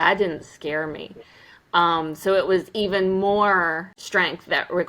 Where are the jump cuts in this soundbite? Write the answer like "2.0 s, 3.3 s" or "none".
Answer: 3.9 s